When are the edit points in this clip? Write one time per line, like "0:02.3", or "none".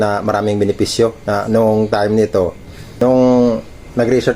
0:02.9